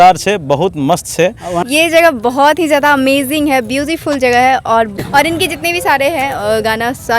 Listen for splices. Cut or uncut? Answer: cut